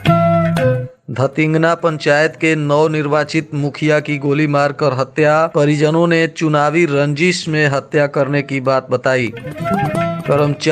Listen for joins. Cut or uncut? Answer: cut